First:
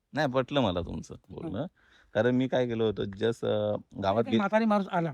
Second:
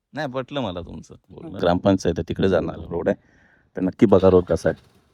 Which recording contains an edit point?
second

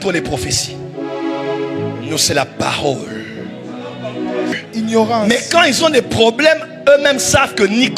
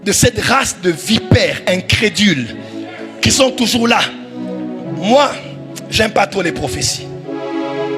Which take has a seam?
first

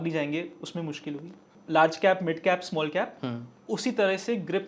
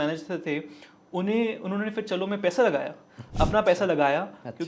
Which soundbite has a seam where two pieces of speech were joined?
first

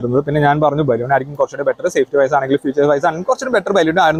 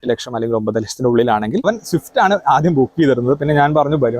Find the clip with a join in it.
second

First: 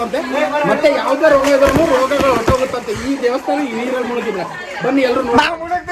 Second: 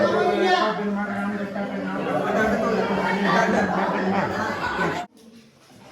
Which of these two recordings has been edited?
second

